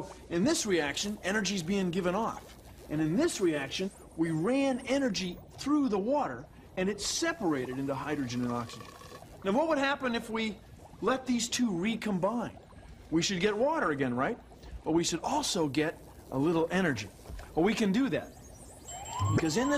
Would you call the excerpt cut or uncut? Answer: uncut